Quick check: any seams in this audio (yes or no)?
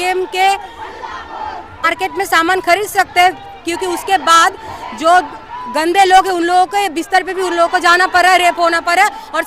yes